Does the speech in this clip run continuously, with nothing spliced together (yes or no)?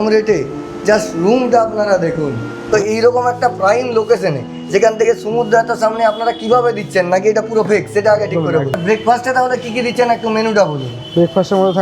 no